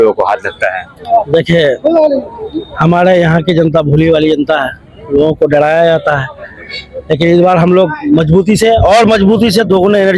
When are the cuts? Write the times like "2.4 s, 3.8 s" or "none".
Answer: none